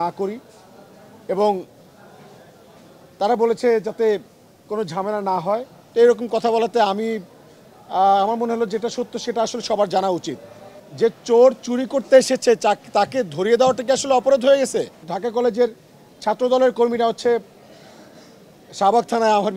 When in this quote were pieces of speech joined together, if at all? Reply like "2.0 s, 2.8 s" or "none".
10.8 s, 15.1 s